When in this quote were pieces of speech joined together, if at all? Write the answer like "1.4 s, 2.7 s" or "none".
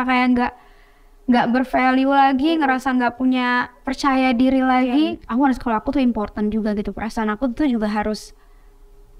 5.2 s